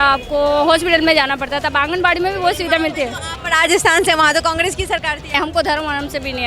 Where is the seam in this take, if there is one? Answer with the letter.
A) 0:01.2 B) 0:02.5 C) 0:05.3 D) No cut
C